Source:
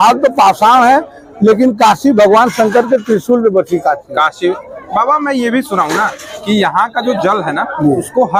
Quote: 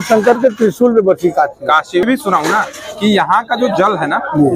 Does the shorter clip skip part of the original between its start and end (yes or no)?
yes